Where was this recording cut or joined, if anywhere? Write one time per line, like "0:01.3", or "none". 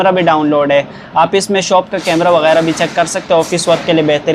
none